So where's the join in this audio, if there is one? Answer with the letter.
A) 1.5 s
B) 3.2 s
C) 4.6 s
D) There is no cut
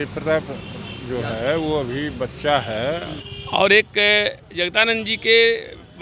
B